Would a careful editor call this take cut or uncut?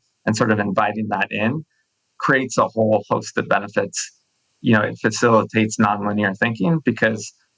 cut